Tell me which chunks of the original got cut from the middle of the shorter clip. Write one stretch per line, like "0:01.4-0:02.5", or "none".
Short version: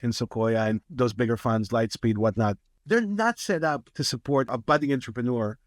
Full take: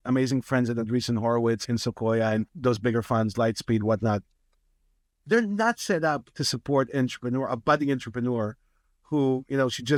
0:04.4-0:05.1
0:06.9-0:07.5